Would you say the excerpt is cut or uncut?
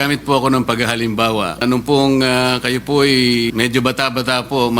cut